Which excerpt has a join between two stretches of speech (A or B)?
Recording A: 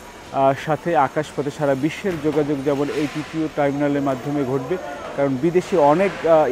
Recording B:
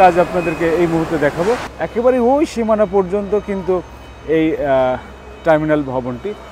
B